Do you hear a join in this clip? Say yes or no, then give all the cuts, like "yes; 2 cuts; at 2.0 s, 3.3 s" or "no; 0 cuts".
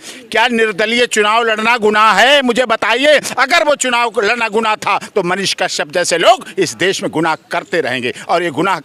no; 0 cuts